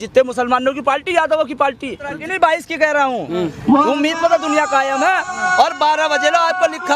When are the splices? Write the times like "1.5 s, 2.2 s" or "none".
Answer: 2.1 s